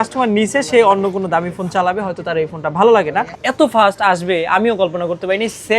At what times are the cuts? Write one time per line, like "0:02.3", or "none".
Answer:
0:03.3